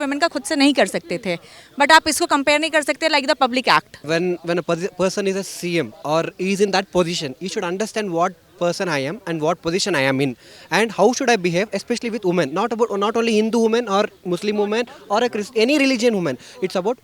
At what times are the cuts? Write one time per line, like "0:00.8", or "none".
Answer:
0:04.0